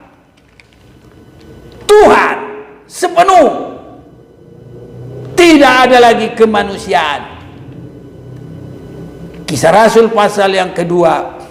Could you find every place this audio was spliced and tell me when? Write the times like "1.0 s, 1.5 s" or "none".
none